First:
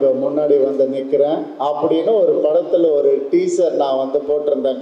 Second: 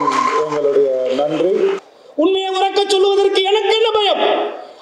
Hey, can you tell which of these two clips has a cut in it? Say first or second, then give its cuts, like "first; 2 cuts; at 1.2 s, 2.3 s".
second; 1 cut; at 1.8 s